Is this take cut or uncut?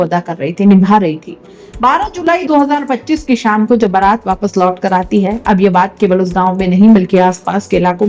uncut